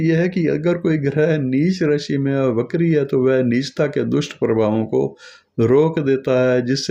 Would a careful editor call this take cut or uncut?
uncut